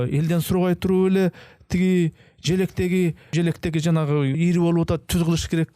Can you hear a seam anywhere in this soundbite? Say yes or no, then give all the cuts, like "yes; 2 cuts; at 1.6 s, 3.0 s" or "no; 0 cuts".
yes; 1 cut; at 3.2 s